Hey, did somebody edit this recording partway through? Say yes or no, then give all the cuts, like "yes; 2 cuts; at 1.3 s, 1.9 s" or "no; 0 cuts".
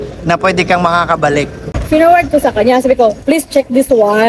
yes; 1 cut; at 1.7 s